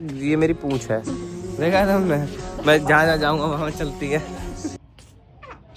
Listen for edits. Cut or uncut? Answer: cut